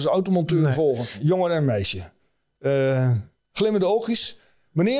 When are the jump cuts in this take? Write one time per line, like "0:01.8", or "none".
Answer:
0:01.1